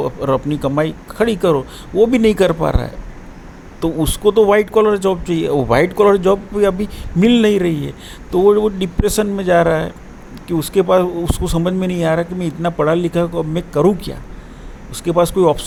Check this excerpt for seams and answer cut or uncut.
uncut